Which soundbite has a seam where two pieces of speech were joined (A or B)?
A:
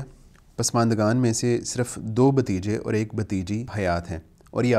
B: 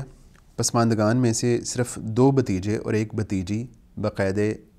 A